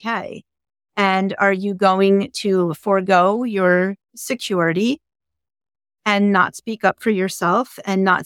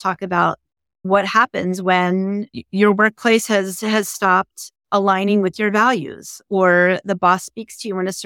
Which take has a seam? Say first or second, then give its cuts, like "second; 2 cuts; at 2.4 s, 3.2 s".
second; 2 cuts; at 1.0 s, 2.6 s